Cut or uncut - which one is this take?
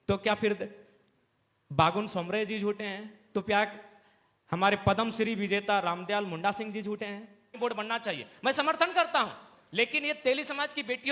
cut